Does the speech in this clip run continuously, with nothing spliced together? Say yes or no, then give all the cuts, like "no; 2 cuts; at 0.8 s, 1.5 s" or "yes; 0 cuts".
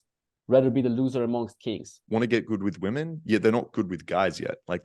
no; 1 cut; at 1.9 s